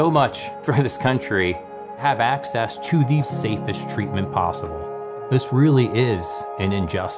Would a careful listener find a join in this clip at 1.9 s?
no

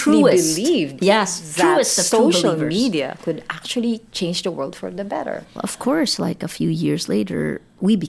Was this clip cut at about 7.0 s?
no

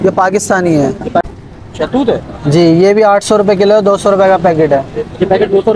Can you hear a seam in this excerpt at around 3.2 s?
no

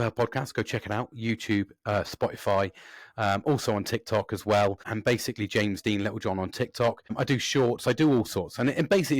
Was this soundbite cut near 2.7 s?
no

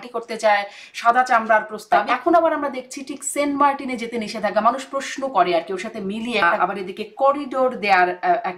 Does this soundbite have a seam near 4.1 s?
no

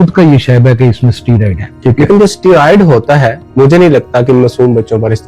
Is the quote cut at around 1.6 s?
yes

